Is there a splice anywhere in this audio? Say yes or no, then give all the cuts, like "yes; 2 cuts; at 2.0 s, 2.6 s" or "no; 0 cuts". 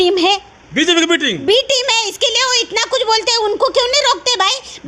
no; 0 cuts